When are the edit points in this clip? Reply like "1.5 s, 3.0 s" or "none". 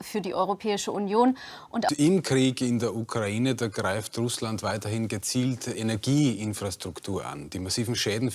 1.9 s